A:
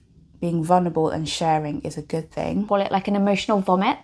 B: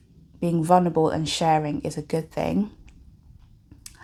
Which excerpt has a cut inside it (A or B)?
A